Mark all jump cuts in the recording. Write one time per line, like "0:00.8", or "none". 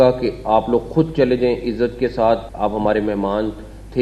0:02.5